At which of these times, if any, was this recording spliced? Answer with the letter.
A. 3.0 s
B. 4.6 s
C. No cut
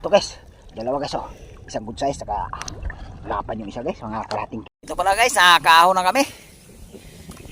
B